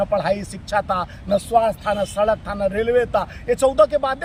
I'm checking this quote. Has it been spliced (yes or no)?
no